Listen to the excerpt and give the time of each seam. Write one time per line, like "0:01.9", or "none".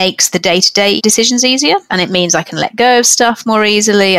0:01.9

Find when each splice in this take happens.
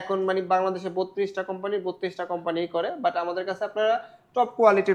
none

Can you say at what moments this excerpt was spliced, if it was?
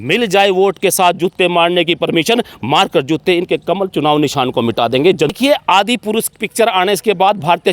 0:05.4

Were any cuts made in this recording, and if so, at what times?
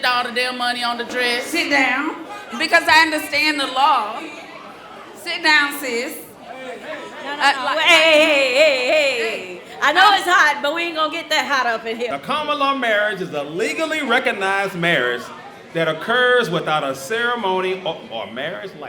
0:01.5
0:12.1

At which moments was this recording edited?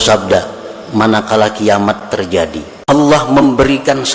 0:02.7

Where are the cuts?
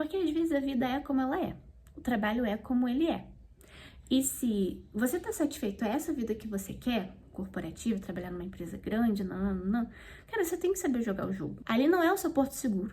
0:11.5

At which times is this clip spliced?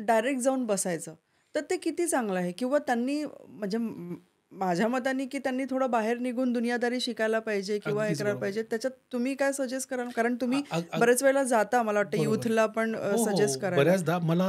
none

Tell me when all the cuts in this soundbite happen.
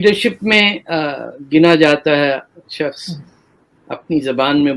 none

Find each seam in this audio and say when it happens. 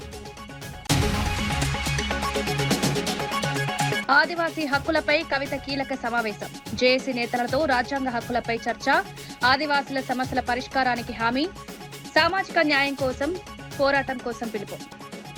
0:00.8
0:02.2
0:03.6

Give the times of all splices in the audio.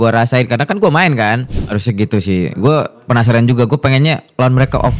0:01.5

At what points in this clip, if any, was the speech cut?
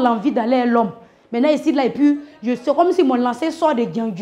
none

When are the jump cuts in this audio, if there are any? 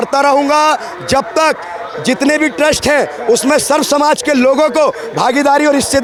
none

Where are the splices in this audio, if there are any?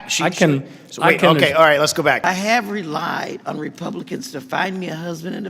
0:02.2

